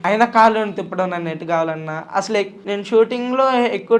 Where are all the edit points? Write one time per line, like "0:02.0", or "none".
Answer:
0:02.6